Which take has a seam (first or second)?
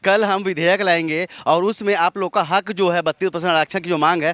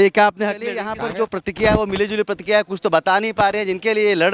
second